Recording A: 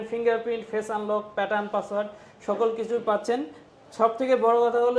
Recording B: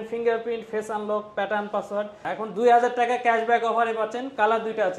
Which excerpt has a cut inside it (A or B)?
B